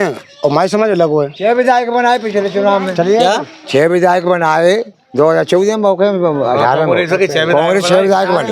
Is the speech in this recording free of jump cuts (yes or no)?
yes